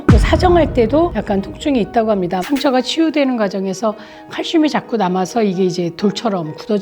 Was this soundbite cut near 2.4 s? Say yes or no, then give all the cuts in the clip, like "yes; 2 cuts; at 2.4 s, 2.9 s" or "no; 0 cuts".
yes; 1 cut; at 2.4 s